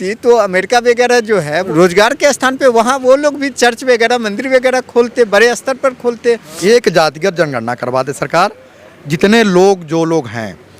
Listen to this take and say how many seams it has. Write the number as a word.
two